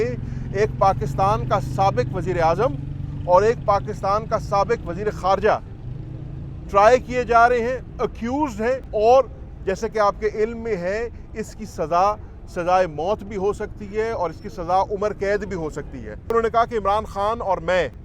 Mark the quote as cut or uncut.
cut